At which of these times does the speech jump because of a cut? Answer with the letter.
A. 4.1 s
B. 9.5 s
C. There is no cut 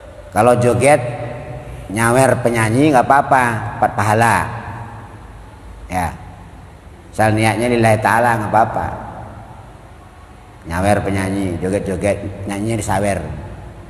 C